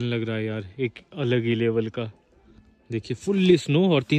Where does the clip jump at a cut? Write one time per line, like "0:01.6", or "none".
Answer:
none